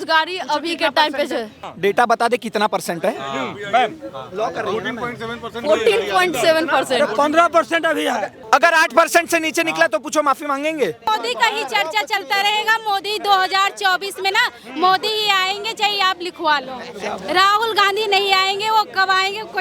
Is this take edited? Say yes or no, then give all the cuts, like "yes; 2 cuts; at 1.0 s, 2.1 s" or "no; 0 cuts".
yes; 3 cuts; at 1.6 s, 8.3 s, 11.1 s